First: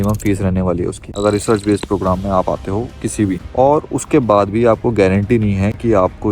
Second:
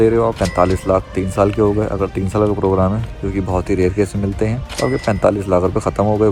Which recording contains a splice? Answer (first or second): first